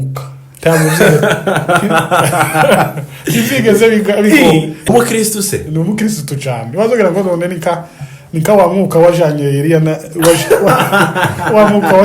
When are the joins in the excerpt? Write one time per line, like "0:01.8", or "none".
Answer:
0:04.9